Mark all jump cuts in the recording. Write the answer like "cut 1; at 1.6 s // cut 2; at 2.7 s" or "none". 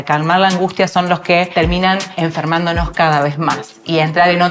cut 1; at 2.0 s